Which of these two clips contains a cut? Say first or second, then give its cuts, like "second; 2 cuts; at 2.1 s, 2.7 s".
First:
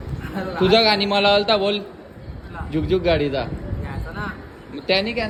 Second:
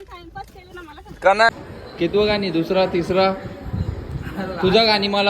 second; 1 cut; at 1.5 s